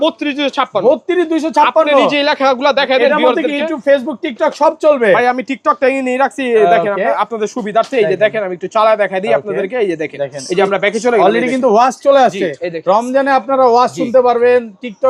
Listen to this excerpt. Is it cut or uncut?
uncut